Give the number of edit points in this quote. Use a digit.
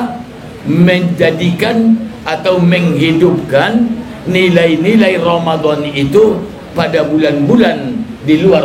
0